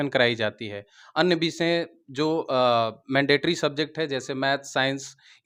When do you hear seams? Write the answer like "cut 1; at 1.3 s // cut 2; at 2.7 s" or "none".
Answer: none